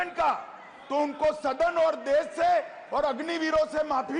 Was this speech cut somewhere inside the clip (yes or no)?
no